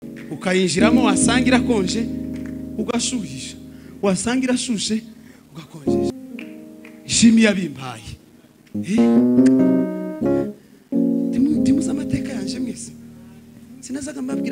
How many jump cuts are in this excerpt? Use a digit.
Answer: 1